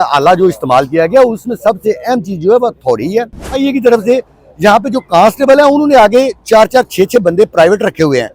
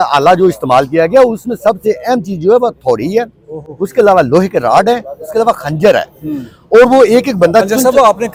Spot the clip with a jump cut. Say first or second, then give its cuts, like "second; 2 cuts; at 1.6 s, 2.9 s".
first; 1 cut; at 3.5 s